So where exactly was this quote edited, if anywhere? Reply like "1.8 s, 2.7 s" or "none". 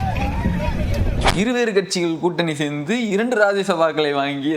1.2 s